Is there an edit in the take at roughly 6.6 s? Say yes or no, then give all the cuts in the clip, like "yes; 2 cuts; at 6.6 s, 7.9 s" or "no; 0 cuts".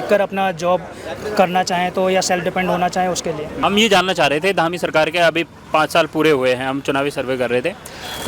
no; 1 cut; at 3.5 s